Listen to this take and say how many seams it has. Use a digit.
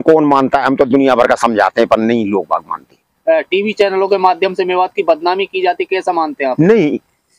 1